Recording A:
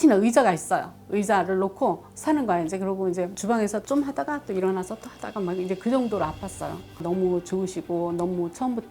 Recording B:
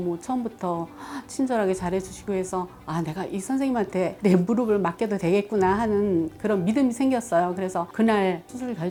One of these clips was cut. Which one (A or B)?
A